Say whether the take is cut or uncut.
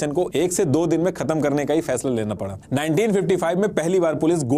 cut